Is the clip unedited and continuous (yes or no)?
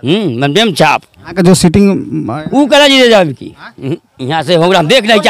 no